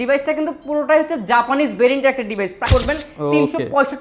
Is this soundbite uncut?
no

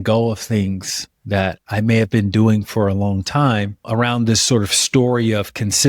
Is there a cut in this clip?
no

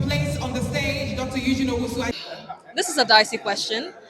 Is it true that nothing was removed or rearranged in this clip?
no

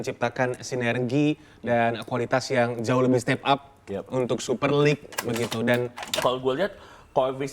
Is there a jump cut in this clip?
yes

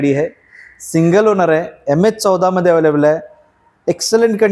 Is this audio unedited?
yes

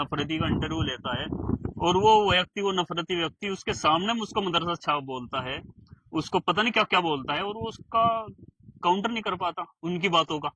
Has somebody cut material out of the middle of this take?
no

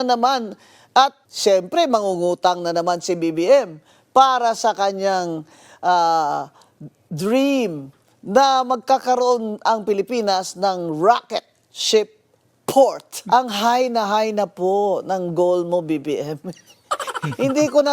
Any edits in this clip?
yes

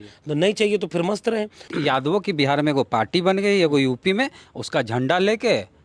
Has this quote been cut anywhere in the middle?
yes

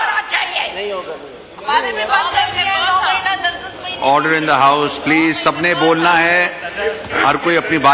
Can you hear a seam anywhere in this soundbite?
no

